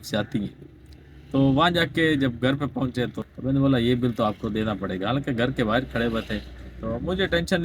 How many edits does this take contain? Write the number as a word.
one